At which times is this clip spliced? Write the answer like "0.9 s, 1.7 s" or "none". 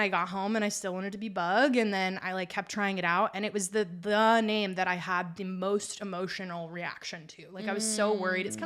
none